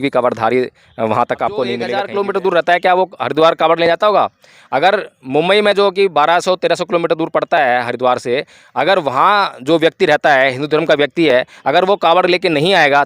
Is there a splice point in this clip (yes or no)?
yes